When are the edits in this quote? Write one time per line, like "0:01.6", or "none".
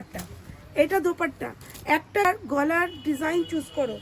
0:02.2